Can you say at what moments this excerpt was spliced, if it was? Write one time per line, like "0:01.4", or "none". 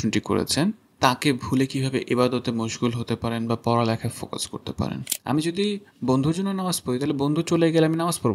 0:05.1